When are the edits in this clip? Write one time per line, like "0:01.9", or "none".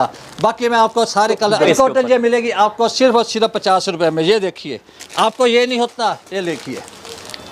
0:01.6